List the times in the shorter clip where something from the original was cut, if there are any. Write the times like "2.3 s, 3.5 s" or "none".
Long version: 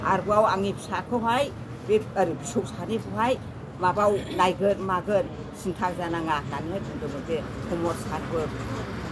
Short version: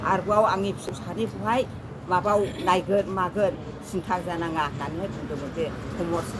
0.9 s